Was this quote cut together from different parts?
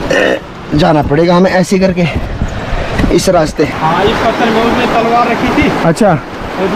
yes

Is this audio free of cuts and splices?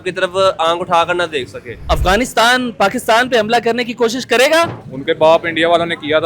no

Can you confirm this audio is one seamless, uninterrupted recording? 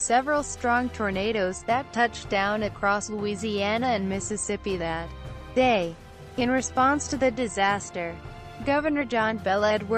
yes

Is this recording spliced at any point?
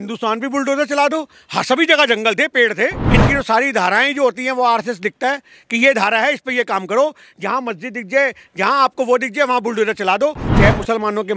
yes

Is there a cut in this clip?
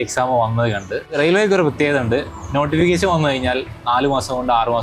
yes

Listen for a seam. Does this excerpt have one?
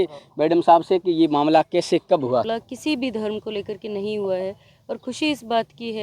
yes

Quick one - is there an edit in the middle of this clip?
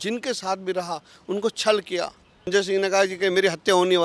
yes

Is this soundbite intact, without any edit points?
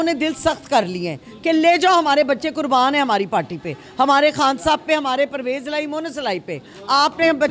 yes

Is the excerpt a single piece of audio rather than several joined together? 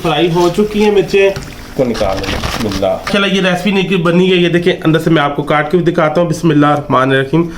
no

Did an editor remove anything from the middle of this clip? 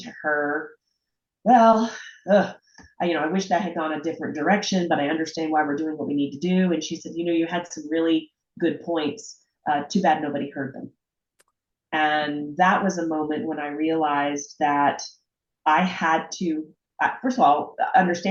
no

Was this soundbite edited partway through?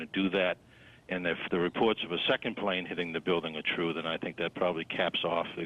no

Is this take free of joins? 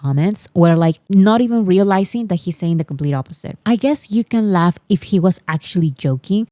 no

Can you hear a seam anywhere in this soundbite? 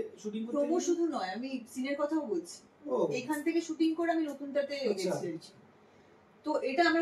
no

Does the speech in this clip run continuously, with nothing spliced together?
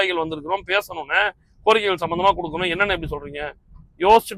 yes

